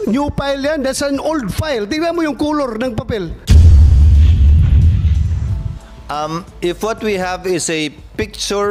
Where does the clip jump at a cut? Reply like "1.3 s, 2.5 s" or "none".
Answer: 3.4 s, 5.6 s